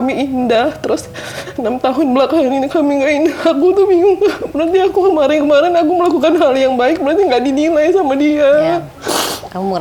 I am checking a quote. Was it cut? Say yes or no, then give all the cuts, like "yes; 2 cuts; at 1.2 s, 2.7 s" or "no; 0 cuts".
no; 0 cuts